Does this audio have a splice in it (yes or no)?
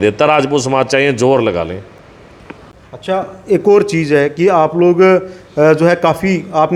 no